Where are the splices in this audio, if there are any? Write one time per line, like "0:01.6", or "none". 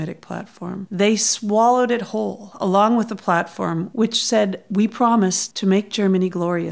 0:03.9